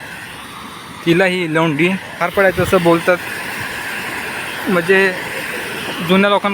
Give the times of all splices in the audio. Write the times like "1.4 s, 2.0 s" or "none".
2.2 s